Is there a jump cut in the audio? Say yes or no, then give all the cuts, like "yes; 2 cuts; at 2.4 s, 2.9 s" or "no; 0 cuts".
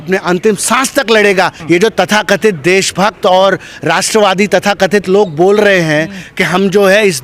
yes; 1 cut; at 1.6 s